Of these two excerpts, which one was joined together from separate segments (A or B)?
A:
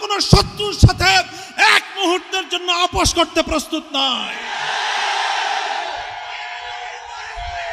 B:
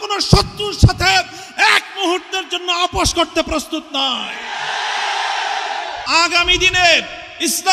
B